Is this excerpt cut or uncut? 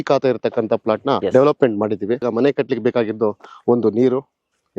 cut